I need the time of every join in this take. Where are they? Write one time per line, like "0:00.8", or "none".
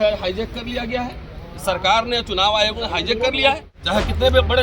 0:03.7